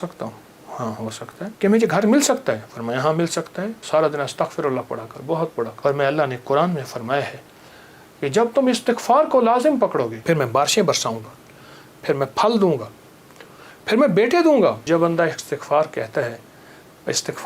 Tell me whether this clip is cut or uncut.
cut